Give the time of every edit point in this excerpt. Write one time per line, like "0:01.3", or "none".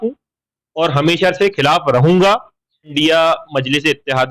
0:02.9